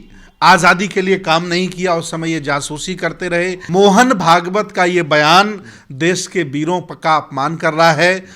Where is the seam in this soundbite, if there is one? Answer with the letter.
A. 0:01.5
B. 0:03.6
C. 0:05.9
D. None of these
B